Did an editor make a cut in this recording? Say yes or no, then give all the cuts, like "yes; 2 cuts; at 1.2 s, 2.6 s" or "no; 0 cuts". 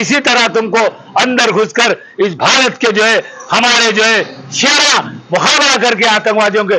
no; 0 cuts